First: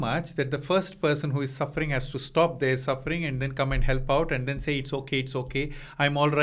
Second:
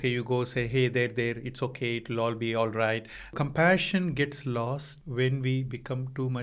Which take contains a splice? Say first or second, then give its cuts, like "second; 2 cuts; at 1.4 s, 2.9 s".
second; 2 cuts; at 3.3 s, 4.9 s